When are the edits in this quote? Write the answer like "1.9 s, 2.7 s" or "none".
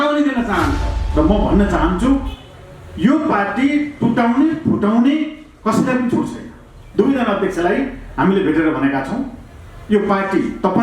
1.0 s

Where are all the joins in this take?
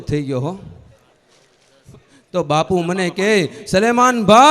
1.8 s

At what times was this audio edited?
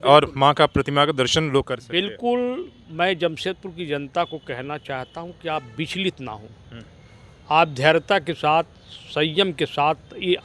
none

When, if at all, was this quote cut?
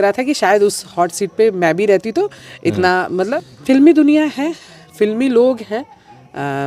3.3 s

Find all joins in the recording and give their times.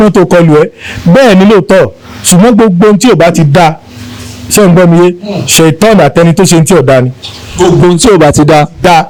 none

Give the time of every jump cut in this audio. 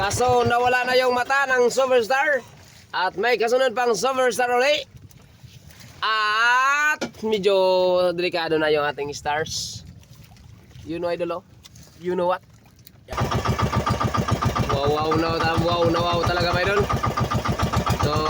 13.1 s

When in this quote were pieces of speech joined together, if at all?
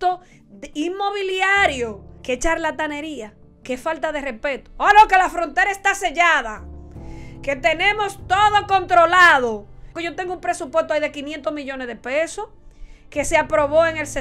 2.1 s, 10.0 s

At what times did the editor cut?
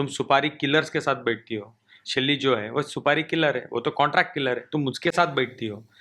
none

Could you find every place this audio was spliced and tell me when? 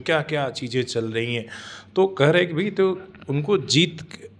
none

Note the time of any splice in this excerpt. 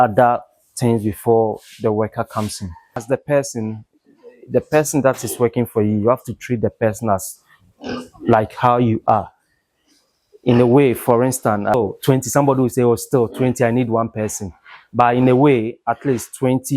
3.0 s, 11.7 s

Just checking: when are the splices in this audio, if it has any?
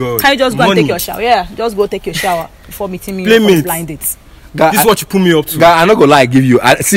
none

